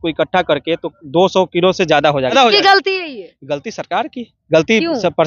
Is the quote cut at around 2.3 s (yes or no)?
yes